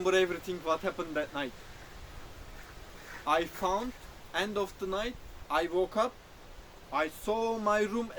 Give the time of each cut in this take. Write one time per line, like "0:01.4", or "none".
none